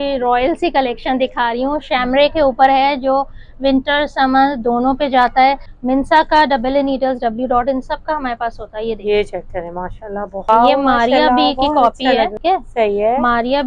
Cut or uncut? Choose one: cut